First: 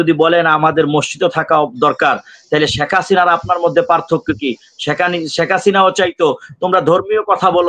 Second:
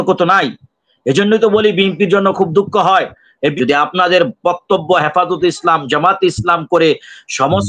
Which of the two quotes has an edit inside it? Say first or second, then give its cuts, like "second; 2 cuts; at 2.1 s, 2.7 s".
second; 1 cut; at 3.5 s